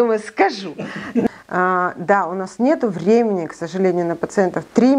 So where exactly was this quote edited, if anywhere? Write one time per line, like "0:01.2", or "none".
0:01.3